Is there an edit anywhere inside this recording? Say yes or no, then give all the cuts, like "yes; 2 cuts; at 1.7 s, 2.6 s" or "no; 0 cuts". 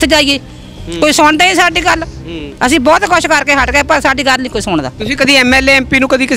no; 0 cuts